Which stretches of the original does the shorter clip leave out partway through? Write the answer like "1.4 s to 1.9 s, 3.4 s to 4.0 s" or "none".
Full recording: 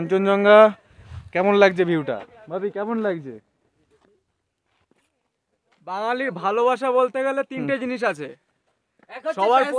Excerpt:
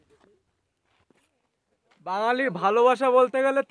none